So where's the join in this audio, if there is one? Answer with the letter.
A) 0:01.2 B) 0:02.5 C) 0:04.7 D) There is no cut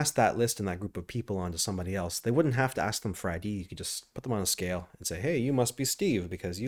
D